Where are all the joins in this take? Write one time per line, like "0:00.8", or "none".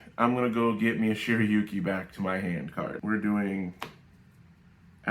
0:03.0